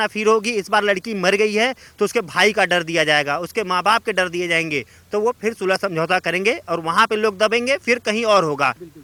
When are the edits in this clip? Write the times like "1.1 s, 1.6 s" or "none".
none